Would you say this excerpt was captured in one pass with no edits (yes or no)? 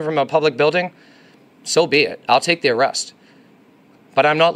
yes